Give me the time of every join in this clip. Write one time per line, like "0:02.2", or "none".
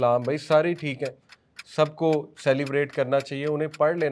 none